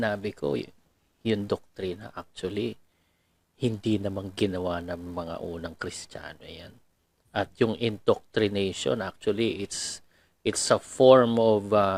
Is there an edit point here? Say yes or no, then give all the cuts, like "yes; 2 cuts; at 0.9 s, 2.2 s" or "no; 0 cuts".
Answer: no; 0 cuts